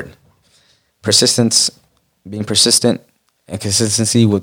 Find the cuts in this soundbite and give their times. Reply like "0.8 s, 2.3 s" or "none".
none